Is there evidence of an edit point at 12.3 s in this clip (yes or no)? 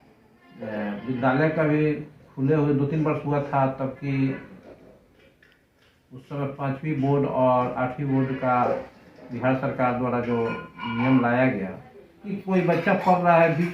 yes